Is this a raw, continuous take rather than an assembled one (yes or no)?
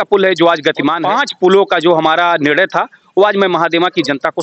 no